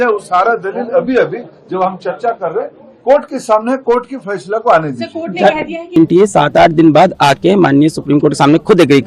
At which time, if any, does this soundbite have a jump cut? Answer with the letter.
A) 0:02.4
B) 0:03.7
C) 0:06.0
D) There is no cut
C